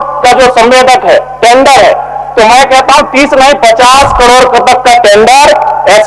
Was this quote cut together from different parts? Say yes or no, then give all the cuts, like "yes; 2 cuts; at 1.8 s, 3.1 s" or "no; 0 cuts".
no; 0 cuts